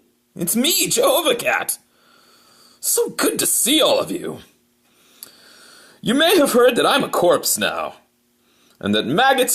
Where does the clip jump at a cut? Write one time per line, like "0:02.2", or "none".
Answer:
none